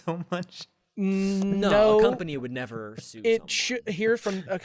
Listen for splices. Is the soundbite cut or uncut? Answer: uncut